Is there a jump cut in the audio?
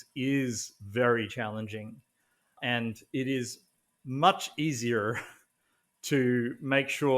yes; 1 cut; at 2.6 s

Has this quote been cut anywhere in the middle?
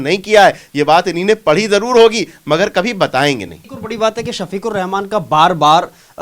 no; 0 cuts

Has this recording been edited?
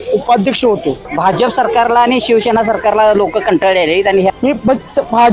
yes; 2 cuts; at 1.0 s, 4.3 s

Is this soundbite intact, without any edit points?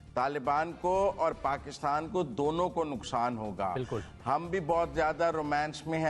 yes; 0 cuts

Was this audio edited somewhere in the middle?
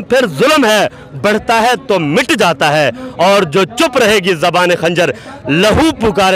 no; 0 cuts

